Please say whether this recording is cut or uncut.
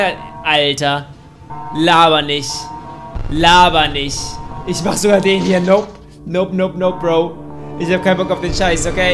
uncut